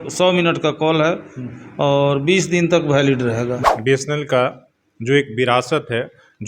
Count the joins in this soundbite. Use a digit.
1